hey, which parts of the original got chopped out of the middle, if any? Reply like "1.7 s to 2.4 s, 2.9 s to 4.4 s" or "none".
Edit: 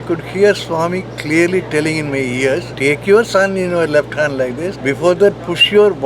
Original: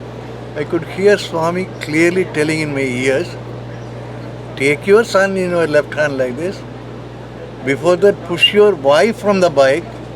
3.3 s to 4.5 s, 6.6 s to 7.6 s